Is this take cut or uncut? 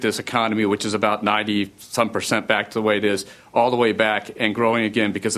uncut